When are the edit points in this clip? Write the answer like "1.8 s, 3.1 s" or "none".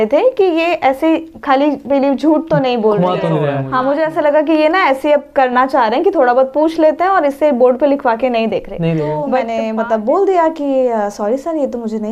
3.5 s, 9.5 s